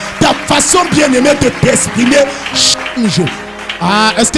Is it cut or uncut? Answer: uncut